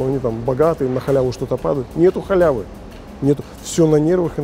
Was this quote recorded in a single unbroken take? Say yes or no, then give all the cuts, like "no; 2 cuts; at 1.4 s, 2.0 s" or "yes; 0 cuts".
yes; 0 cuts